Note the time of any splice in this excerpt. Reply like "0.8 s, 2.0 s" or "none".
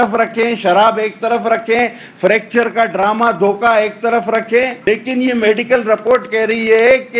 4.8 s

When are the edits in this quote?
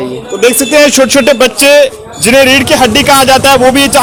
none

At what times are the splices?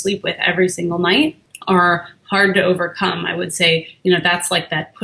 1.5 s

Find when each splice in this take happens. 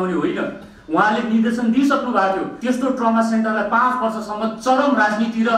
2.5 s

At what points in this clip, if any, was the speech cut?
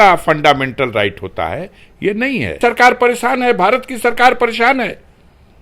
2.5 s

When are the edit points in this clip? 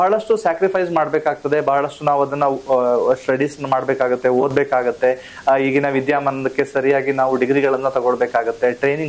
none

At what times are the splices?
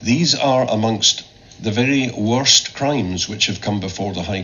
none

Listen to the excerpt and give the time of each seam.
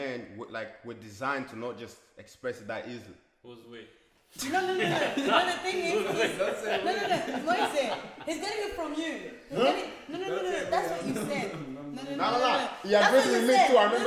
none

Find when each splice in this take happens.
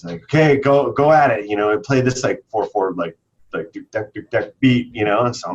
none

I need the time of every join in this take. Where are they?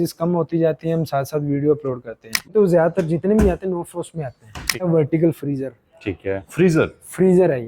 2.5 s, 4.9 s

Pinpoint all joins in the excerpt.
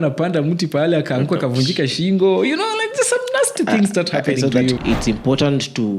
4.8 s

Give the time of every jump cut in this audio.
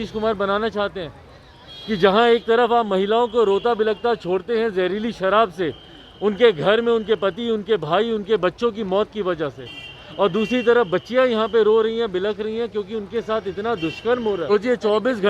14.2 s

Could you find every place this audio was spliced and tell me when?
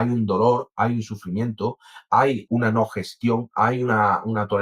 2.4 s

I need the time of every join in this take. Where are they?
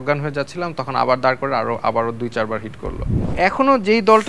3.3 s

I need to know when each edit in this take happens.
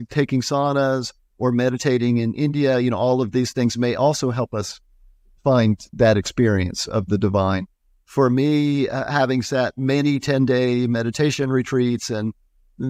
none

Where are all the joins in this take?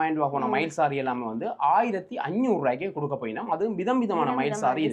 none

